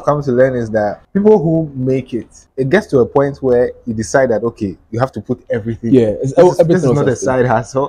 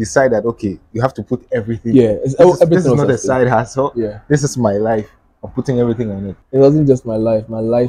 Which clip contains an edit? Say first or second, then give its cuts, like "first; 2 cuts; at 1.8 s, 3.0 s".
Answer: first; 1 cut; at 1.0 s